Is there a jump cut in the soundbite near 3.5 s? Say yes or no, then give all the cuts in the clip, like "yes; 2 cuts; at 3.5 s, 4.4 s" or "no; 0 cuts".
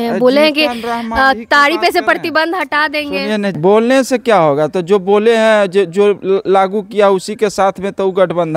yes; 1 cut; at 3.5 s